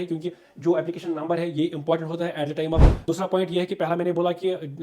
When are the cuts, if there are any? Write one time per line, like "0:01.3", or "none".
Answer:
0:03.0